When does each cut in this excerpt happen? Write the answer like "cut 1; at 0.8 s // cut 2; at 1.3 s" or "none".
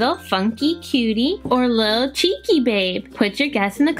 cut 1; at 1.4 s // cut 2; at 3.0 s